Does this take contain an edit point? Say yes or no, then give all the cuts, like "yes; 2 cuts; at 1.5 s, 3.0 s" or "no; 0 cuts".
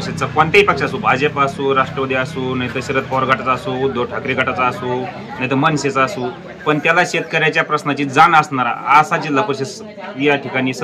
no; 0 cuts